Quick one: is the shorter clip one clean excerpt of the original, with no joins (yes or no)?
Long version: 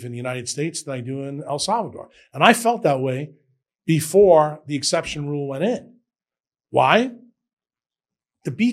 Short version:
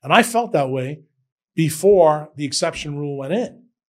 yes